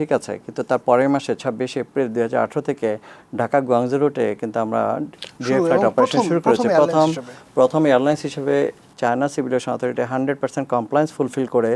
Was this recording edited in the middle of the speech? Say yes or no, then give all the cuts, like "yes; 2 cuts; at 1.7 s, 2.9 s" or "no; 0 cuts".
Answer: no; 0 cuts